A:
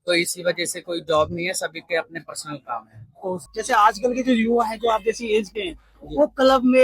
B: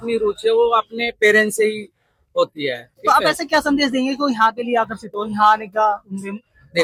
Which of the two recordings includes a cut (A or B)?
A